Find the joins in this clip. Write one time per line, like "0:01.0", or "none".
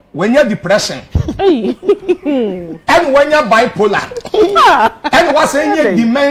none